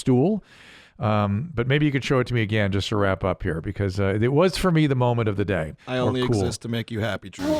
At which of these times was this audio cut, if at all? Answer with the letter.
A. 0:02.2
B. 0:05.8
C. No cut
B